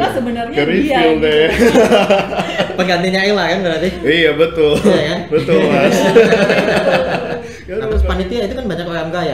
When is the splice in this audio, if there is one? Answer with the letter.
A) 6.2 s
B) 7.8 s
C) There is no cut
B